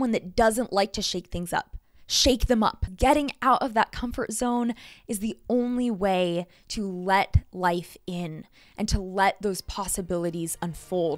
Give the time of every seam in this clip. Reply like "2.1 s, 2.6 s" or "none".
2.9 s